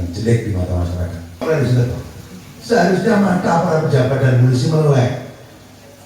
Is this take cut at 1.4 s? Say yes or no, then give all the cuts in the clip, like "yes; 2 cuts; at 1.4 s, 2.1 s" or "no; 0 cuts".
yes; 1 cut; at 1.4 s